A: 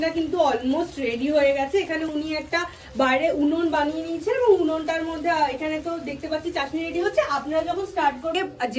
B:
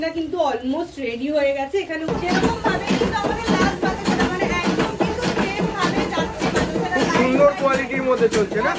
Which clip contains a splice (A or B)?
B